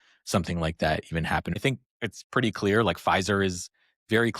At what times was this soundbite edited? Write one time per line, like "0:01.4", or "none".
0:01.5